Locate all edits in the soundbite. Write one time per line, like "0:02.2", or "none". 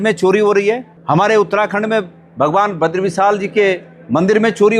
0:00.9